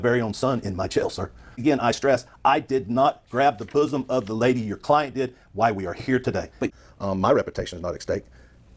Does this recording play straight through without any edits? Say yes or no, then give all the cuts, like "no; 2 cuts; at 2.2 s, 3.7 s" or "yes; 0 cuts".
no; 2 cuts; at 1.6 s, 6.7 s